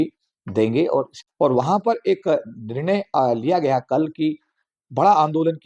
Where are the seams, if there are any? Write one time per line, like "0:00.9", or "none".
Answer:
0:01.1